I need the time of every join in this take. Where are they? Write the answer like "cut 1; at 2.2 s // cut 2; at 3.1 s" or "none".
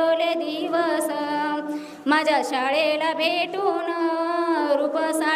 none